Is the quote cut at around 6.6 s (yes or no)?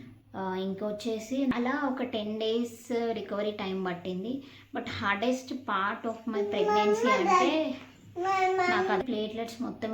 no